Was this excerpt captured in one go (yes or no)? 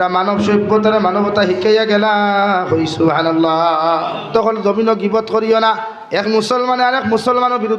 no